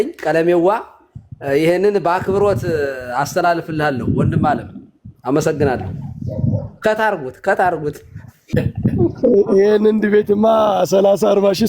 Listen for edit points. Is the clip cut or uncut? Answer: cut